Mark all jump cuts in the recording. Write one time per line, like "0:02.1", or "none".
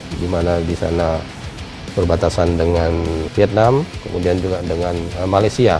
0:03.3